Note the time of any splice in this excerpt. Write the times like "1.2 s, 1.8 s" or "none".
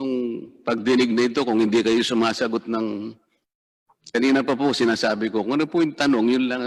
none